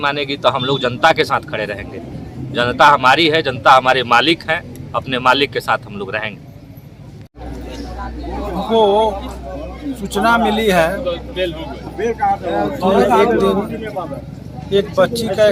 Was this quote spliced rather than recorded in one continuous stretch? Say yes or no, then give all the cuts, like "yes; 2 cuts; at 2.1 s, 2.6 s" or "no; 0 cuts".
no; 0 cuts